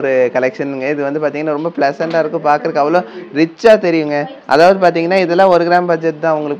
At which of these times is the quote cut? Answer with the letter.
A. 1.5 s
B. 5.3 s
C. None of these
C